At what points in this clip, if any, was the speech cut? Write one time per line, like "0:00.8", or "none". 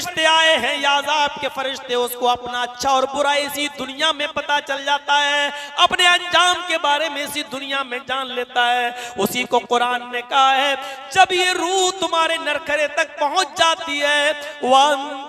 none